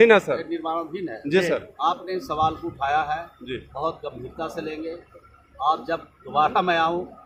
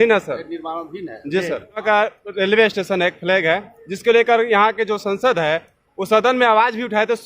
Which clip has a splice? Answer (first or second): second